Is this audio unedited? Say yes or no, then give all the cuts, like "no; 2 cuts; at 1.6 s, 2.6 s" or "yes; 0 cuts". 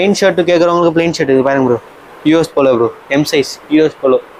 yes; 0 cuts